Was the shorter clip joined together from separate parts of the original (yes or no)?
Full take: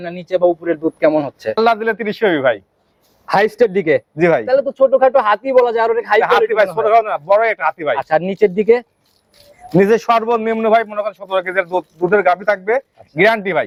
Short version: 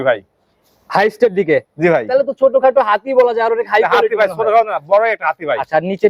no